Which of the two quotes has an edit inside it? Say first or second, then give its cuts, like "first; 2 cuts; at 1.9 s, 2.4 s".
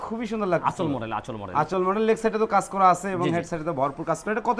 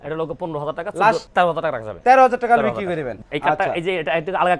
second; 2 cuts; at 1.2 s, 3.2 s